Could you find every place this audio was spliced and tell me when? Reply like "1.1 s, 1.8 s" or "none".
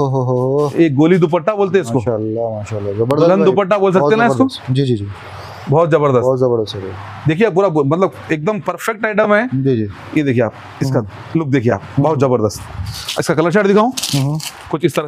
none